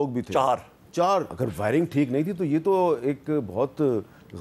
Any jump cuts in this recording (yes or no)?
yes